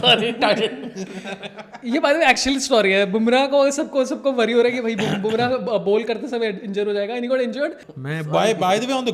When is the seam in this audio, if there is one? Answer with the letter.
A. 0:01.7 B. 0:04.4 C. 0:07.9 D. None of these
C